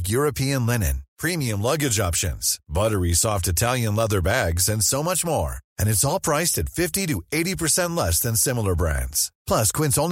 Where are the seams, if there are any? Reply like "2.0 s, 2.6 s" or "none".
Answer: none